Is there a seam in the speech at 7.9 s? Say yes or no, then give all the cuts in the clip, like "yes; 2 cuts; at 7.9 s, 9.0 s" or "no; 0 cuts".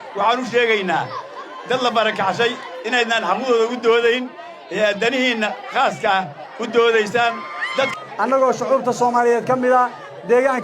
yes; 1 cut; at 7.9 s